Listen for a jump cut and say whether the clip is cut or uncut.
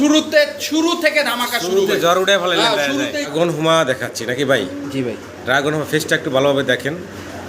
cut